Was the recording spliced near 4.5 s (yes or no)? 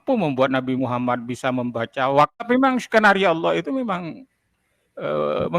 no